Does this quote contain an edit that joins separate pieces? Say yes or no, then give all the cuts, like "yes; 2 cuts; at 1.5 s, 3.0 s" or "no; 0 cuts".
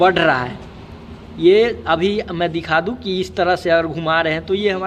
no; 0 cuts